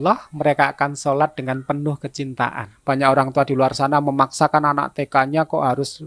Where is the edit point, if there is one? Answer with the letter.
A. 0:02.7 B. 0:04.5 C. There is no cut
A